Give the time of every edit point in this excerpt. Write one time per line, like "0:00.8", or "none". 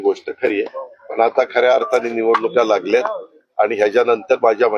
none